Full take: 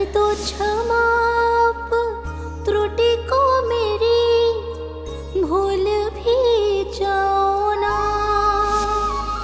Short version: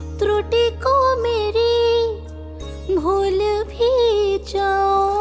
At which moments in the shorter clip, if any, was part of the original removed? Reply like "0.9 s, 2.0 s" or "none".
none